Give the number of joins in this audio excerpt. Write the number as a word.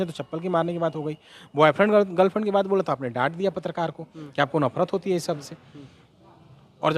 zero